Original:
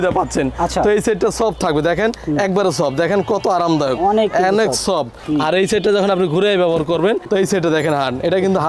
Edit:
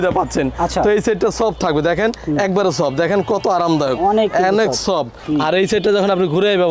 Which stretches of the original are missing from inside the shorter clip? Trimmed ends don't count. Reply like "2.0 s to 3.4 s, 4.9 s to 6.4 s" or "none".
none